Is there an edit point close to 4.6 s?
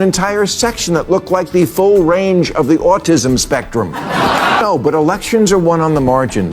yes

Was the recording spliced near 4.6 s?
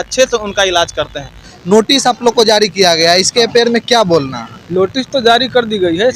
no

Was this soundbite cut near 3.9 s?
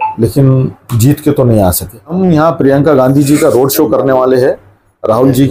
no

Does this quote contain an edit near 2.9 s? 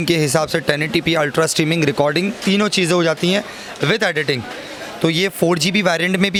no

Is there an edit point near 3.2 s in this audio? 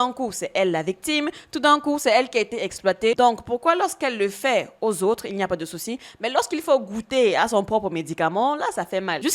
yes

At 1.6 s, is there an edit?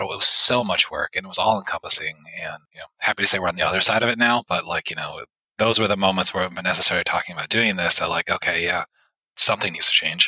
no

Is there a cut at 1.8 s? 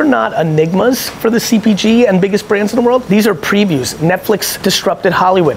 no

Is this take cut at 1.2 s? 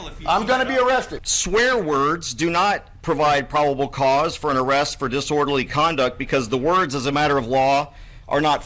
yes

